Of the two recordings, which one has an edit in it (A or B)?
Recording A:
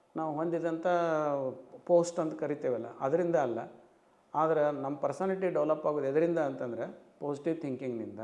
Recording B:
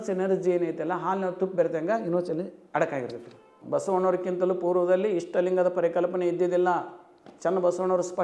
B